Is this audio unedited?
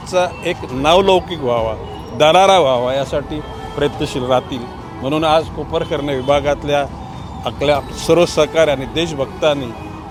yes; 0 cuts

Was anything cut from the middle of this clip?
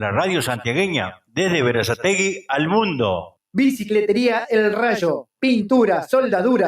yes; 1 cut; at 3.4 s

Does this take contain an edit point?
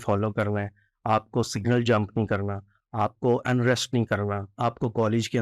no; 0 cuts

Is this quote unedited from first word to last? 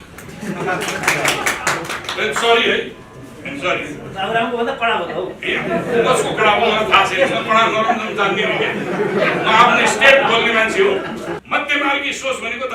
no; 1 cut; at 11.4 s

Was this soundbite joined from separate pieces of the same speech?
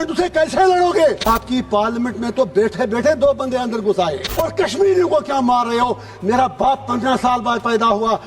yes; 2 cuts; at 1.2 s, 4.3 s

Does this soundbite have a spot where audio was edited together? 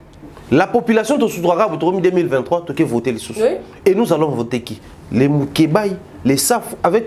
no; 0 cuts

